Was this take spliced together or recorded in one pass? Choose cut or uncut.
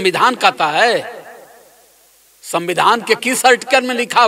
uncut